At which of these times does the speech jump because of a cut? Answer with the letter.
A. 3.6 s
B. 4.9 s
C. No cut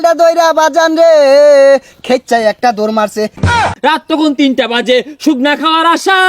A